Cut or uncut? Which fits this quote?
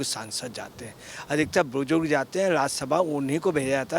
uncut